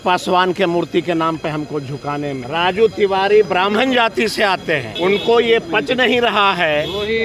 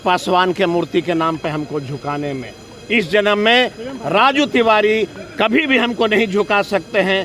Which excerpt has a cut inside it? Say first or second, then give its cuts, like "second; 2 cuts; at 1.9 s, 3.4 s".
first; 2 cuts; at 2.4 s, 4.9 s